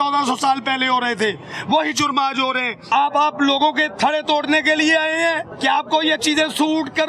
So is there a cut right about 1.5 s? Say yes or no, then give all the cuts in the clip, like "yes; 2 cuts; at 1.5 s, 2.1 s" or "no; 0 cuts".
no; 2 cuts; at 2.9 s, 5.5 s